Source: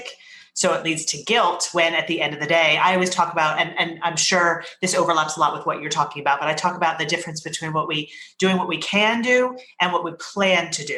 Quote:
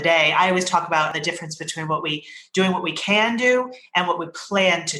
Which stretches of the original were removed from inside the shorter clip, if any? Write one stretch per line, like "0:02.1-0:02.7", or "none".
0:03.6-0:07.0